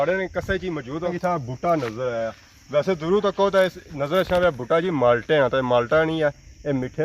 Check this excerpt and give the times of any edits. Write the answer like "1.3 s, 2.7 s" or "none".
1.1 s